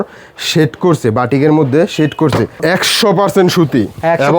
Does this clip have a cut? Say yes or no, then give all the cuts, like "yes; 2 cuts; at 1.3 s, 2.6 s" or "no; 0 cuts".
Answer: yes; 1 cut; at 2.5 s